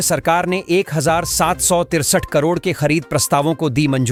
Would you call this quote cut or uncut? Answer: uncut